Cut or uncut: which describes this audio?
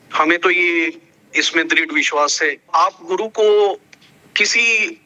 cut